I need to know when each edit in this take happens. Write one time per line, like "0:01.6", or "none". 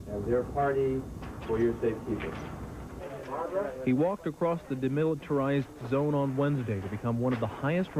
0:06.3